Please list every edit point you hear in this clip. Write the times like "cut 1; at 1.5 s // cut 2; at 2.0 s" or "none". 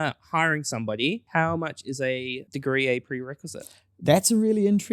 cut 1; at 1.2 s // cut 2; at 2.4 s

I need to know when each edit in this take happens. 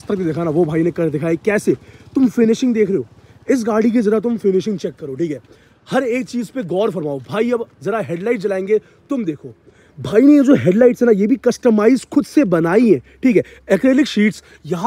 none

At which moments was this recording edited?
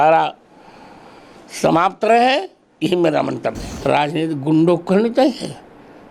cut 1; at 3.7 s

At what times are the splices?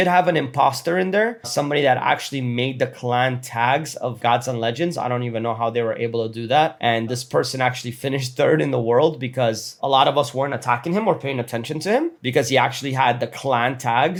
none

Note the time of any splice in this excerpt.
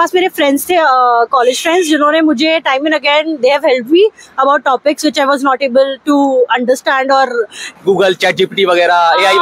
cut 1; at 7.6 s

